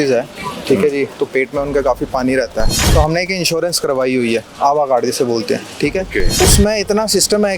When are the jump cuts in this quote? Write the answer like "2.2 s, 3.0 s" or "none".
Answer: 2.8 s, 6.3 s

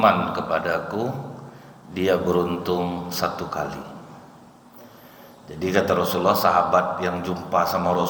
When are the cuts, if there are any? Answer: none

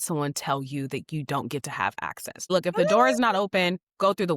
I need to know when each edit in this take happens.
2.5 s

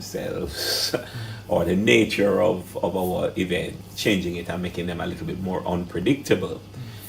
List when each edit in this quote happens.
3.8 s

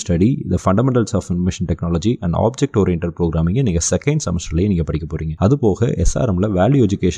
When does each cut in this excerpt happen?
none

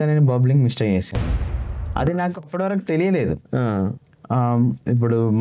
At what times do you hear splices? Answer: none

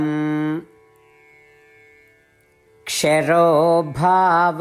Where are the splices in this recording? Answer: 1.2 s, 2.9 s

